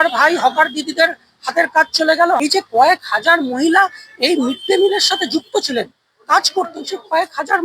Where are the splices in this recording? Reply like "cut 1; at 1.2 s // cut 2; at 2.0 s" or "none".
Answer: cut 1; at 2.4 s

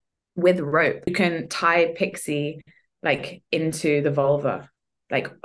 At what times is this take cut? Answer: cut 1; at 1.1 s

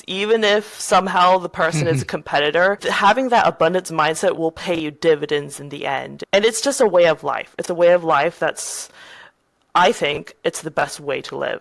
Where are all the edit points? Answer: cut 1; at 6.1 s

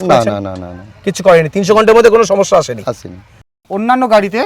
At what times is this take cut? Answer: cut 1; at 3.6 s

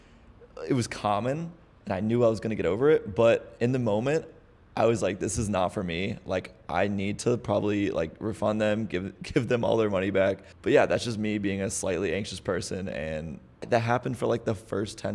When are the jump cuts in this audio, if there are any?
cut 1; at 10.5 s // cut 2; at 13.7 s

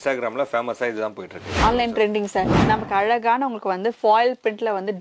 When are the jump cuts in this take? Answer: cut 1; at 2.6 s

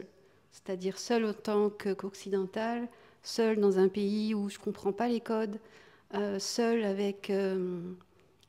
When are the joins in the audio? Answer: none

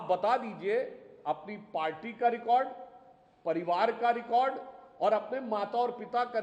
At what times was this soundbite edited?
none

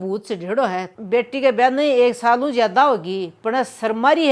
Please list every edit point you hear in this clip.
cut 1; at 0.9 s

